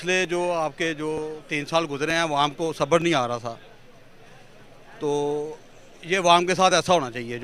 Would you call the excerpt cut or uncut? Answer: uncut